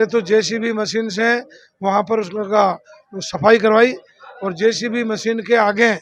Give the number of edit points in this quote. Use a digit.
0